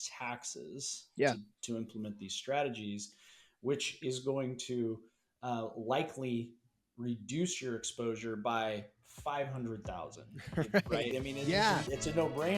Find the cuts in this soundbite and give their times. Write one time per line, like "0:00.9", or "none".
0:11.1